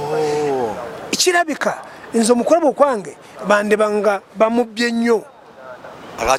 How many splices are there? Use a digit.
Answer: 0